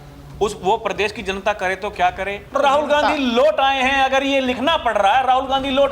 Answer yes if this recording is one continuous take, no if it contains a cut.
no